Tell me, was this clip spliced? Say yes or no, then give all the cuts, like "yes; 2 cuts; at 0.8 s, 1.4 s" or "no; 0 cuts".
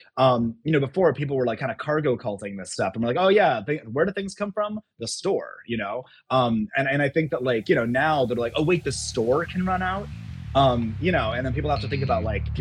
no; 0 cuts